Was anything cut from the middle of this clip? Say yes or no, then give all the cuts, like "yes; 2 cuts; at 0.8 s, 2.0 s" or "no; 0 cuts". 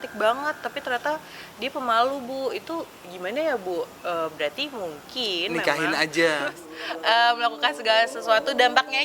yes; 1 cut; at 6.6 s